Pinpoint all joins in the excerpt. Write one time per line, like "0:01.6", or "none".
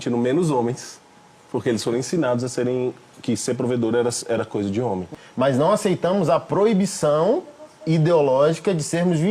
0:05.2